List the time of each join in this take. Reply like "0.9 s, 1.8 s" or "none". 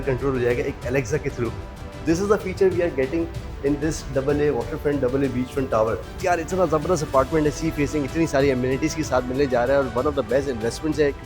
6.1 s